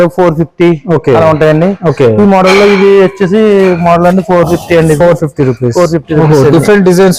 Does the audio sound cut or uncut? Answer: uncut